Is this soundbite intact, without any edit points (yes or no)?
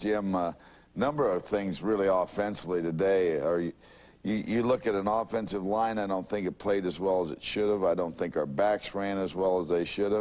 no